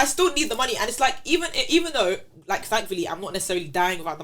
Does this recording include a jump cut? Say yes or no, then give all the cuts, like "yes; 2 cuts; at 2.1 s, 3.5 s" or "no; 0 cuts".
no; 0 cuts